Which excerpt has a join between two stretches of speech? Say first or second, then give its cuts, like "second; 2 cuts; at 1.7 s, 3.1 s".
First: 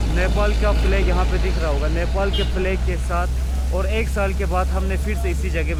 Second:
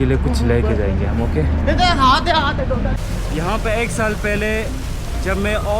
second; 1 cut; at 3.0 s